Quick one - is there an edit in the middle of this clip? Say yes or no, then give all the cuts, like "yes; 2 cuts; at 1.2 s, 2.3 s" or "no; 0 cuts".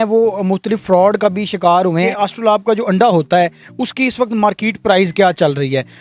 yes; 1 cut; at 1.9 s